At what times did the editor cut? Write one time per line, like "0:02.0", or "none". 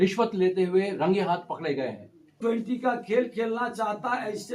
0:02.4